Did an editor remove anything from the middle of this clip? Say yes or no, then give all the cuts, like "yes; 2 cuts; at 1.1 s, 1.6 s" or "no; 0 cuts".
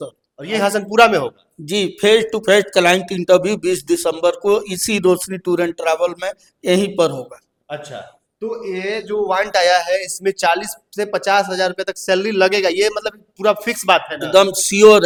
no; 0 cuts